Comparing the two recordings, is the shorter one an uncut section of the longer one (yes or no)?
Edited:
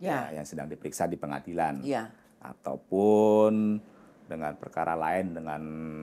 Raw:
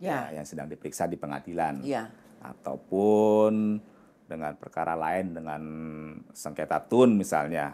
yes